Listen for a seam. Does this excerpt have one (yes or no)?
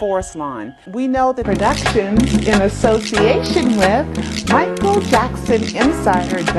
no